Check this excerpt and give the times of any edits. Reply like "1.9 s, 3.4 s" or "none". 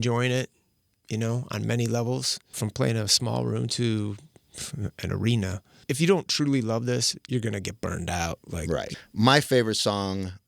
2.5 s, 5.8 s, 8.9 s